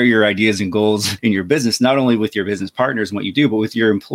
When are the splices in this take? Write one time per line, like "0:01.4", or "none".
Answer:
0:01.1